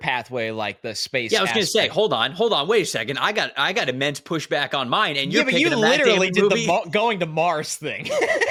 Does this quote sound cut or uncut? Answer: uncut